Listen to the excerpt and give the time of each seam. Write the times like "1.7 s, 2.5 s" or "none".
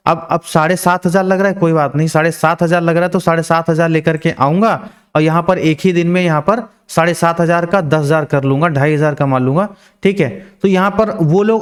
none